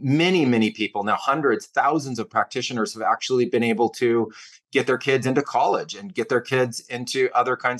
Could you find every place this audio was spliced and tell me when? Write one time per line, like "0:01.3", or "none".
none